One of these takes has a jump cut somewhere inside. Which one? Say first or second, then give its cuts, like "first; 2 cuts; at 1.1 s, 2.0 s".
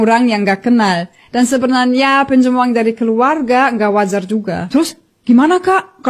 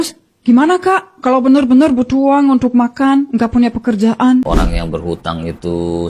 second; 1 cut; at 4.5 s